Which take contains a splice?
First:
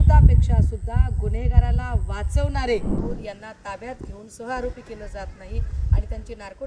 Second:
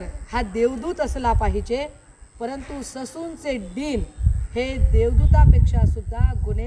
first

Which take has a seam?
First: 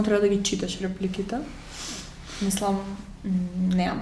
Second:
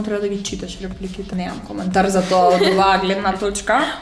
second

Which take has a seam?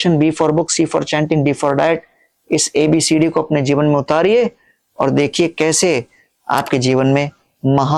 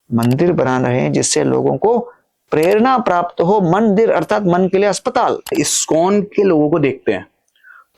second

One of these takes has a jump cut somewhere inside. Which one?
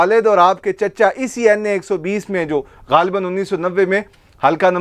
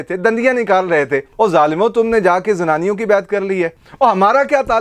second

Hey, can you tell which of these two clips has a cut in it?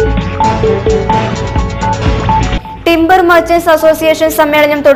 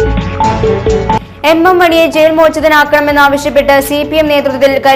first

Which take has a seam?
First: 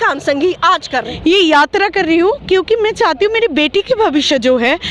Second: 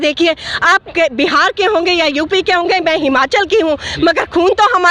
first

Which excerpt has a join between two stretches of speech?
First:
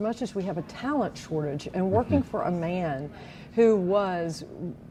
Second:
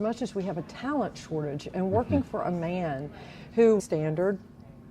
second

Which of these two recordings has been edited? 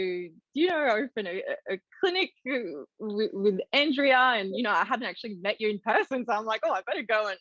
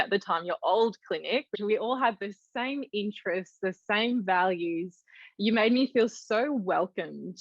second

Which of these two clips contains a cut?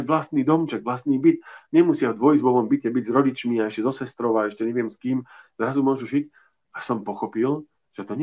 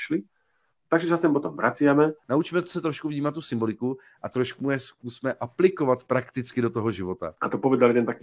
second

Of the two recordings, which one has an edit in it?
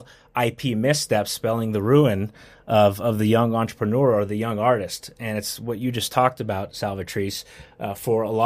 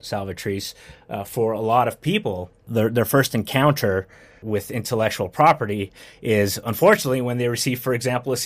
second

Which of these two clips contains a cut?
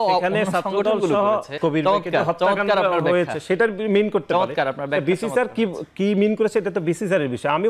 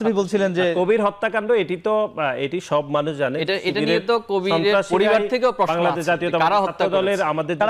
first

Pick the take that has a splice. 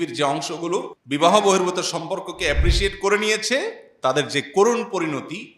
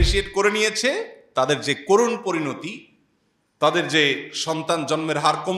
first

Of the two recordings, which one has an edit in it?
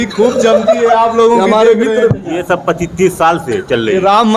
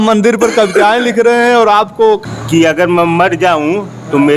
second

